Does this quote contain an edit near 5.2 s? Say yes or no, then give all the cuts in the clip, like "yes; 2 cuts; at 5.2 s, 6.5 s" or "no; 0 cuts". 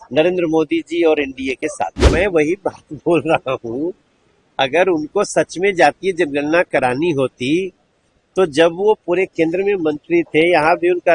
no; 1 cut; at 2.0 s